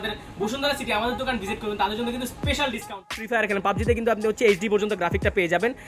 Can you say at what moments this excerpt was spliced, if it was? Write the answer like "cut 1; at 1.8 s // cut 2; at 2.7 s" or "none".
cut 1; at 3.2 s

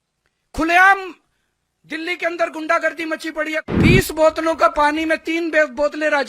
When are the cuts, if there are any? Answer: cut 1; at 3.6 s

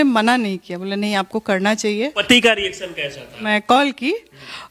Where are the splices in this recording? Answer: cut 1; at 2.2 s // cut 2; at 3.4 s

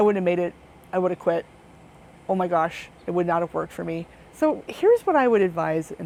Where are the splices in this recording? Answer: none

